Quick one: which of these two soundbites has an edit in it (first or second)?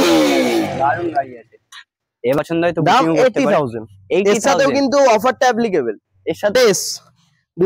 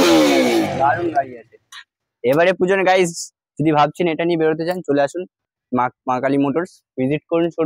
first